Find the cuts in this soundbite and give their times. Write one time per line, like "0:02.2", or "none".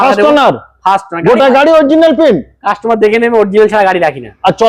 none